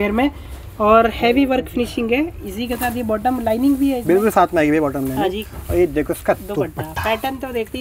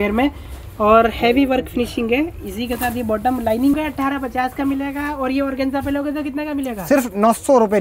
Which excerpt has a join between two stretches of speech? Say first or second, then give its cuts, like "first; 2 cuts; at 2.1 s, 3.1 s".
second; 1 cut; at 3.8 s